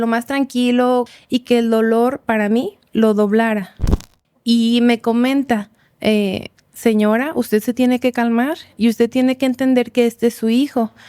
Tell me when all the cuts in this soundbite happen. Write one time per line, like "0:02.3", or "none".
0:01.1
0:03.8